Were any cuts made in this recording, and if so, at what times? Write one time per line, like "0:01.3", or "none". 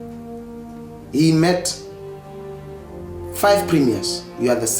none